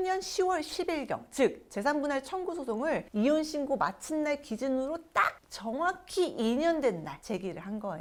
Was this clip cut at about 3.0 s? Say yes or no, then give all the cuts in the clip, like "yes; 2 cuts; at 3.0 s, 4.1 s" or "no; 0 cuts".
no; 0 cuts